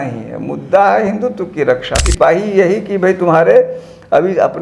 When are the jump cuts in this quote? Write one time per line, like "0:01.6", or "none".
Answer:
0:02.1